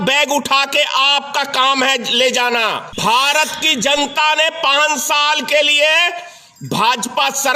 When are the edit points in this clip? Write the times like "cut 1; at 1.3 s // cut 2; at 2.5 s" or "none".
cut 1; at 2.9 s